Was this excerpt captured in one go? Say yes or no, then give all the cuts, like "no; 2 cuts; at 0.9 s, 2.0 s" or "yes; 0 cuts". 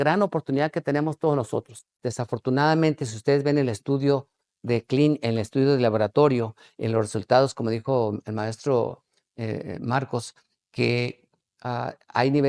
no; 1 cut; at 2.0 s